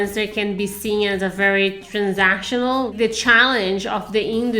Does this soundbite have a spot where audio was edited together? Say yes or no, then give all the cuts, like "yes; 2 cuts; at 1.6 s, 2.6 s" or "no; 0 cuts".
yes; 1 cut; at 2.9 s